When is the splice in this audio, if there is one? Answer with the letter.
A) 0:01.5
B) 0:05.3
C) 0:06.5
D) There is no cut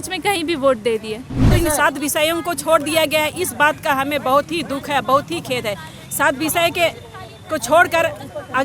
A